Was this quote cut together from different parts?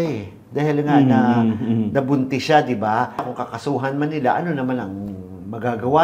yes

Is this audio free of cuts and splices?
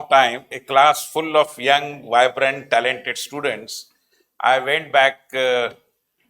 yes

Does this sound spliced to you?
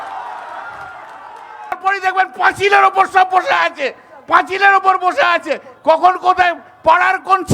yes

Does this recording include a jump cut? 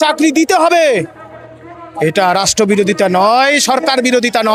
no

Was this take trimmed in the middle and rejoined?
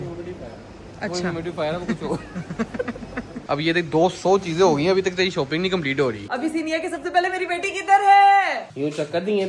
yes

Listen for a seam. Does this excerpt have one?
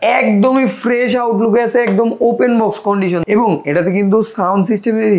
yes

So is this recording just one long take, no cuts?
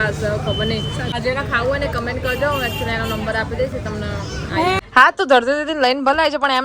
no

